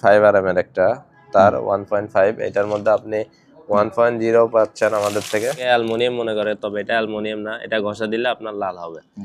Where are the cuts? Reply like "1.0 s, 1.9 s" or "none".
5.6 s